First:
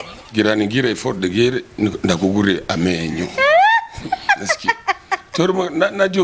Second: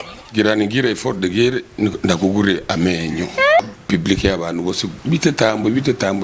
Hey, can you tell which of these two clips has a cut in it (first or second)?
second